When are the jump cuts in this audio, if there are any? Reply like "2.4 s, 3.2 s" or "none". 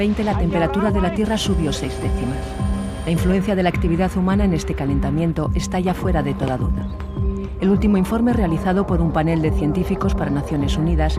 10.2 s